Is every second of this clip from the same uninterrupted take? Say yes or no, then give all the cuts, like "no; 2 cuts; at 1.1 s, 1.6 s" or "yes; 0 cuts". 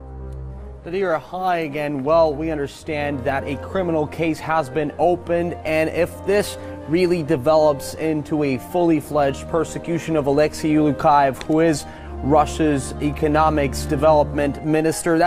yes; 0 cuts